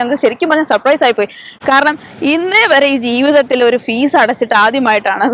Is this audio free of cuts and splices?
yes; 0 cuts

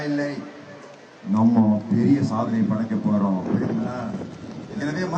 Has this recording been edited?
no; 0 cuts

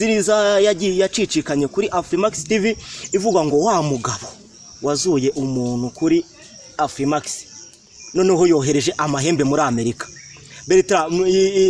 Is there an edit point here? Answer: no; 0 cuts

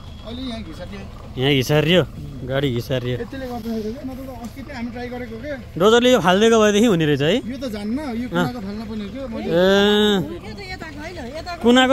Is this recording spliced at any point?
no; 0 cuts

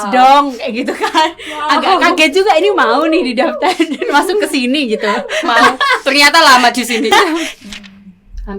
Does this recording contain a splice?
yes; 1 cut; at 7.5 s

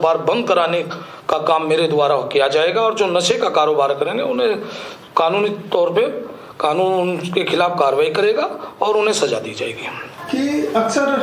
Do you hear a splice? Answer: no; 0 cuts

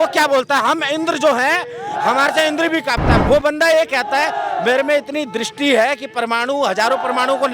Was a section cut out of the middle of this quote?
yes; 1 cut; at 3.1 s

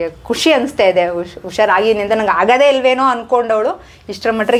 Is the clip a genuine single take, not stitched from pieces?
yes; 0 cuts

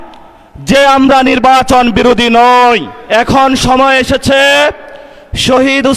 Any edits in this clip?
yes; 1 cut; at 2.9 s

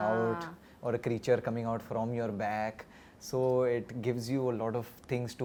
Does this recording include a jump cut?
no; 0 cuts

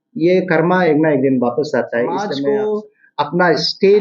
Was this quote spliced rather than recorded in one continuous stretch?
yes; 1 cut; at 2.4 s

